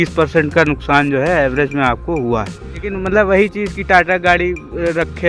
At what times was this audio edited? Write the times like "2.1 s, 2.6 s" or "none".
2.9 s